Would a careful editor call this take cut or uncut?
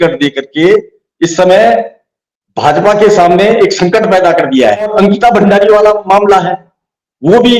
cut